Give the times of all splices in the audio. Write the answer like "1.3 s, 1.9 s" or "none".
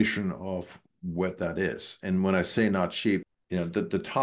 3.2 s